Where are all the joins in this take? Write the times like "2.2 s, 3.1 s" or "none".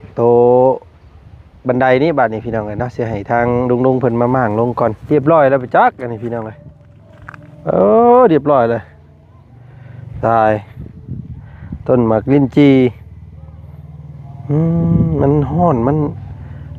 5.0 s